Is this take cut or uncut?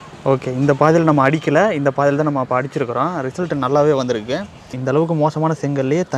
cut